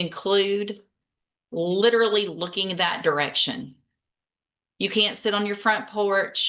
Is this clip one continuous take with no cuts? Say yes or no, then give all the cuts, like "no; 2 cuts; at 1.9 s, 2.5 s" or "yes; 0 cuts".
yes; 0 cuts